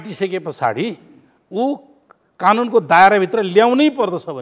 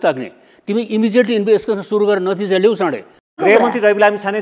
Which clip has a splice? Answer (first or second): second